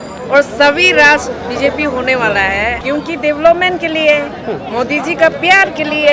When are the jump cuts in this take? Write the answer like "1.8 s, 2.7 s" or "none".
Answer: 2.8 s